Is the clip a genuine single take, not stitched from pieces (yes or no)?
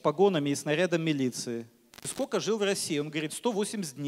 no